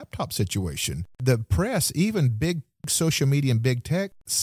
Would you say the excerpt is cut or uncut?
cut